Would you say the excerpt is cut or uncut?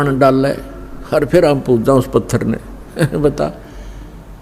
uncut